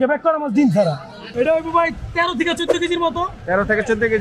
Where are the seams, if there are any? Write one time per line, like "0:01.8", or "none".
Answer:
0:01.3